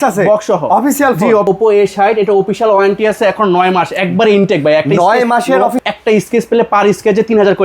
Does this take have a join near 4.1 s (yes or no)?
no